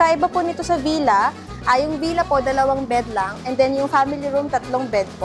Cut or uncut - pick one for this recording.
uncut